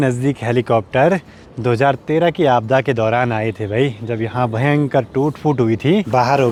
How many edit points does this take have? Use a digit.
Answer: 0